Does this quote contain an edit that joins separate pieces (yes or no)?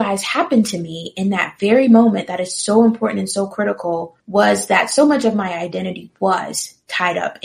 yes